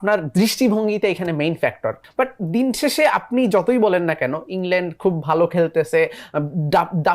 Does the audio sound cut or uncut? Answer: cut